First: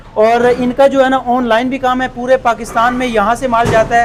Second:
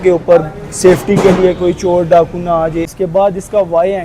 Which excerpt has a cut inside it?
second; 1 cut; at 2.9 s

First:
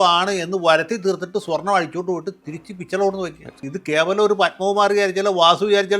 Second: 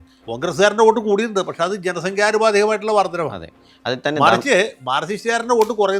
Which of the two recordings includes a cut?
first; 1 cut; at 3.7 s

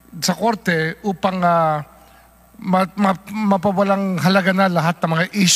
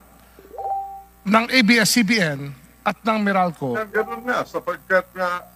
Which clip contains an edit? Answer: second; 1 cut; at 3.8 s

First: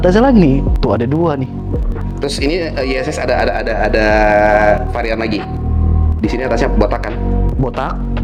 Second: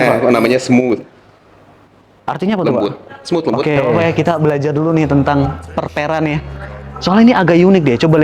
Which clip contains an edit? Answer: second; 1 cut; at 4.0 s

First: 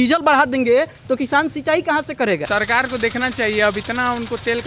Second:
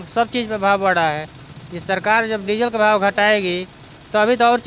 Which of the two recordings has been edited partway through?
first; 1 cut; at 2.4 s

